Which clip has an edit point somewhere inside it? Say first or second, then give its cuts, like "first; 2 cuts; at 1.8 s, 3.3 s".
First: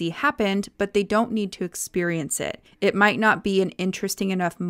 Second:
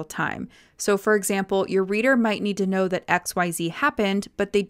first; 1 cut; at 2.6 s